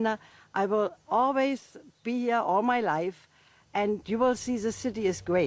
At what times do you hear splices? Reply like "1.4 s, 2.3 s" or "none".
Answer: 2.2 s

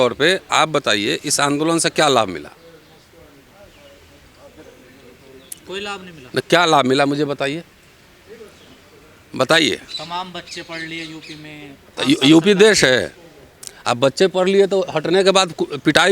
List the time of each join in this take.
none

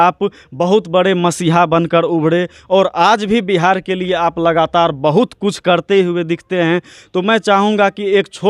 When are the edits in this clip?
none

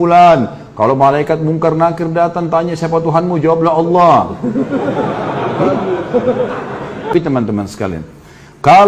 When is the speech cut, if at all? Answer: 7.1 s

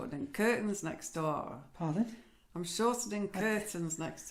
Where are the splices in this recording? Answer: none

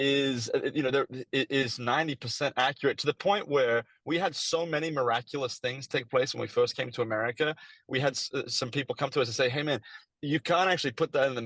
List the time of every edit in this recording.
none

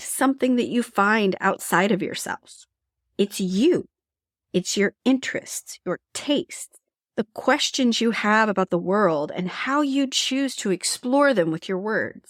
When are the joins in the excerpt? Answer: none

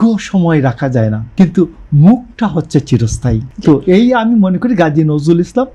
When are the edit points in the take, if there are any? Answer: 1.2 s, 3.5 s

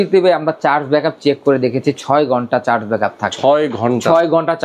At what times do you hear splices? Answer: none

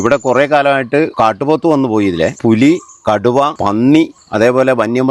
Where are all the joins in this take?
1.1 s, 2.4 s, 3.6 s, 4.2 s

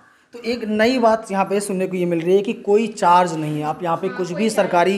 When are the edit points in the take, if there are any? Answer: none

